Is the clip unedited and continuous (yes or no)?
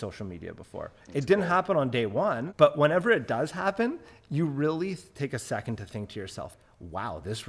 no